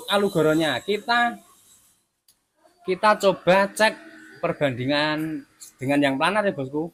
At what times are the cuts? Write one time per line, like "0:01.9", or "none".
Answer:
none